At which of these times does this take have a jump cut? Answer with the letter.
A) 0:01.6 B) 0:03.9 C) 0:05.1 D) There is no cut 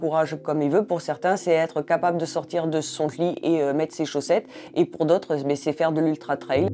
D